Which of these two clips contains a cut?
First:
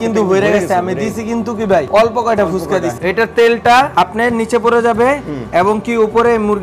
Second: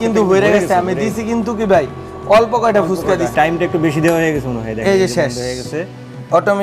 first; 3 cuts; at 1.9 s, 2.9 s, 3.9 s

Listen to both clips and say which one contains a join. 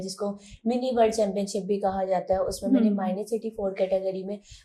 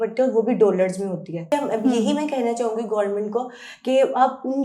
second; 1 cut; at 1.5 s

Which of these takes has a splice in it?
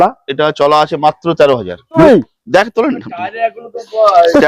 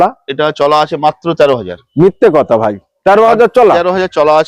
first; 1 cut; at 2.0 s

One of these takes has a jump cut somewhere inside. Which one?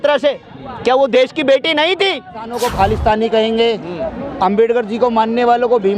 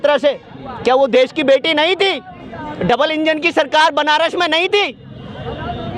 first; 1 cut; at 2.5 s

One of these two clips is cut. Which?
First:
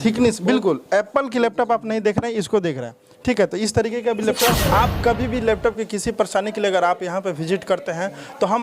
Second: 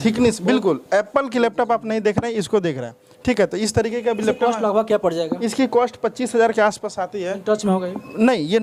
first; 1 cut; at 4.6 s

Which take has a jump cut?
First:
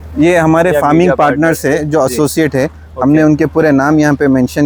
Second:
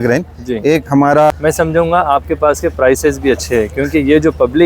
second; 1 cut; at 1.3 s

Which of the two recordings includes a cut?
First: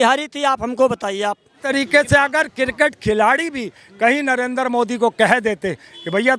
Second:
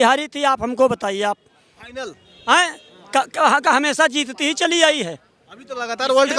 first; 1 cut; at 1.7 s

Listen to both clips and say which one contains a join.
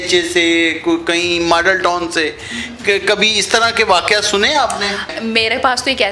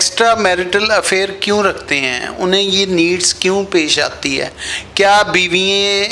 first; 1 cut; at 5.1 s

